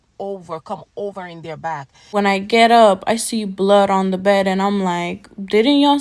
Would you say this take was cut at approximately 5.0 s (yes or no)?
no